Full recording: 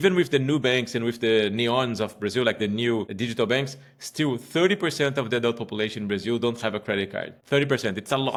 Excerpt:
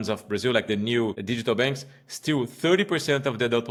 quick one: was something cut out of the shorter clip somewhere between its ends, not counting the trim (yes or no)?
no